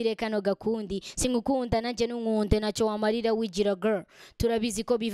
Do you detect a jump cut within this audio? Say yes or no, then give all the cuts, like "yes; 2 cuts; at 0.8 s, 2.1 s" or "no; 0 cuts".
no; 0 cuts